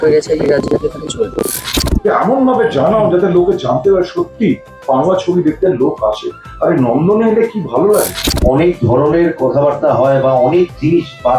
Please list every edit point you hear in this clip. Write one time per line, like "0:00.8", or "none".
0:01.6
0:08.3